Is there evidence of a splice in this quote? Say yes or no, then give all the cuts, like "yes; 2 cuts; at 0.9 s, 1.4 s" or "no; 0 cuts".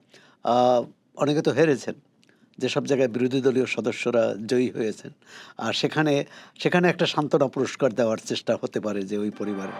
no; 0 cuts